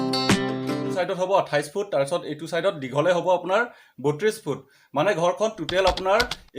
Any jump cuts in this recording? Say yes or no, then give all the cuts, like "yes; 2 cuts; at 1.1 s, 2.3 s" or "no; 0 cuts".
yes; 1 cut; at 0.9 s